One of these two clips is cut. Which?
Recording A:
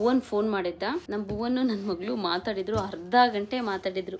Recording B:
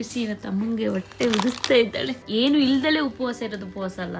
B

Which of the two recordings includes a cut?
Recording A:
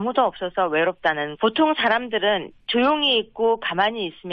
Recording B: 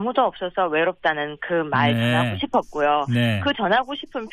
B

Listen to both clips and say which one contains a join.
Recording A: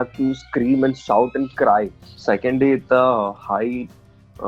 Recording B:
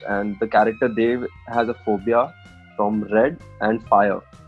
A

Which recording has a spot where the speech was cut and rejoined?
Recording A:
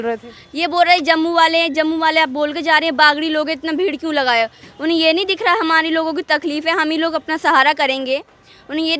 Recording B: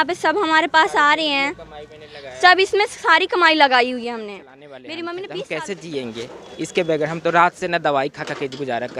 B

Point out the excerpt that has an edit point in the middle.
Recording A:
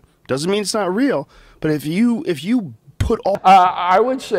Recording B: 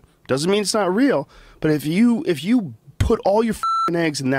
A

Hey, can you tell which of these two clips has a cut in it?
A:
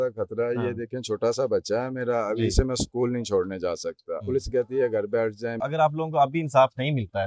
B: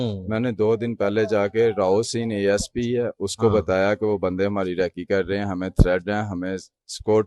A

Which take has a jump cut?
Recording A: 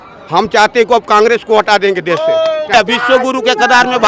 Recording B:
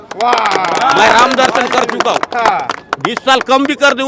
A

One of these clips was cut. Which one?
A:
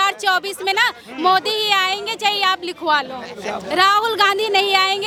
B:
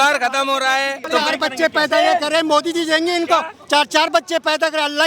B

